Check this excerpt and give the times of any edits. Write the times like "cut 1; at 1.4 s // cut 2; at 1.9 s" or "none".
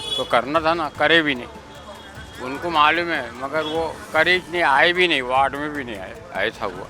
none